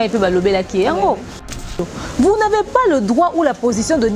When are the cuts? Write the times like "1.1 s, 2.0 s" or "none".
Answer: 1.6 s